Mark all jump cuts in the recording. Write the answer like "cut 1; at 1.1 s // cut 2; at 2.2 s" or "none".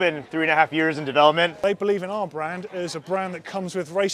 cut 1; at 1.5 s